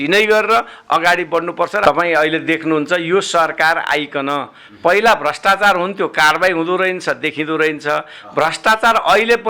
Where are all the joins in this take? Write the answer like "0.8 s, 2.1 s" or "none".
1.8 s